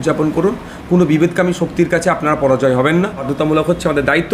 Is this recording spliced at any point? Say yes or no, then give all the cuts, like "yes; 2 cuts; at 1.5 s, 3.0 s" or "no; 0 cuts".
yes; 1 cut; at 3.3 s